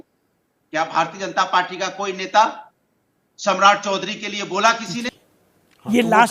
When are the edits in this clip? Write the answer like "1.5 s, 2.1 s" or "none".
5.1 s

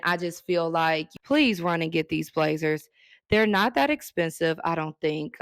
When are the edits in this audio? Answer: 1.1 s

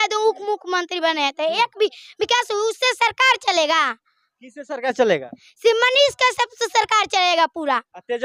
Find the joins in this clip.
none

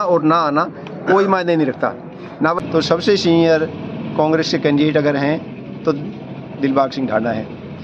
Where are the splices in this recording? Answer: 2.6 s

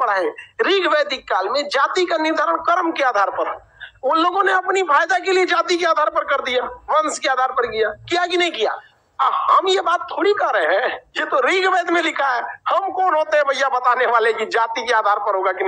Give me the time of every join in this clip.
none

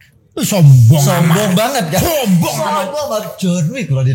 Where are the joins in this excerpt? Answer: none

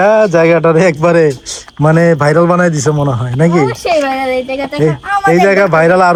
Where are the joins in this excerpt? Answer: none

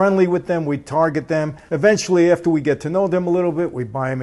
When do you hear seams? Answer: 1.6 s

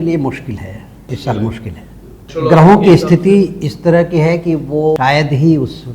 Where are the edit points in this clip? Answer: 1.1 s, 2.3 s, 5.0 s

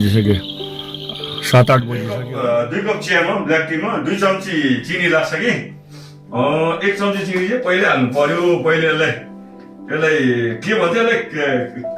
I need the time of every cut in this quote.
1.9 s

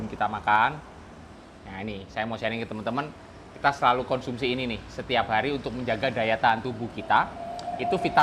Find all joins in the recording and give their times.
none

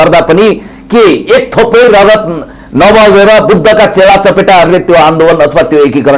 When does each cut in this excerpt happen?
none

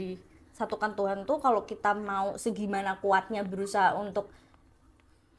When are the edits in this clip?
none

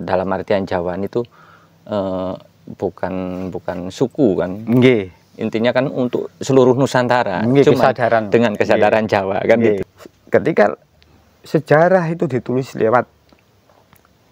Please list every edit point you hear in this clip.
9.9 s

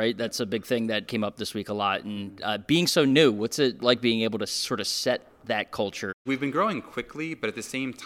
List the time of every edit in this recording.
1.1 s, 3.8 s, 6.1 s

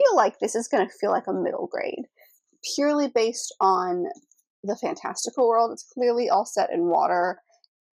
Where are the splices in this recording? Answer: none

